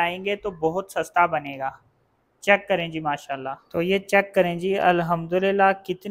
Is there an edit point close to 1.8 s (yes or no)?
no